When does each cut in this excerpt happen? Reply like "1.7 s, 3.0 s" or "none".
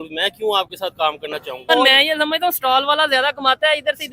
1.7 s